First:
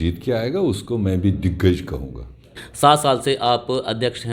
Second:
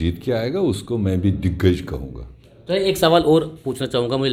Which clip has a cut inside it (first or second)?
first